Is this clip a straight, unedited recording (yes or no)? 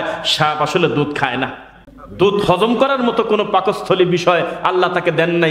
no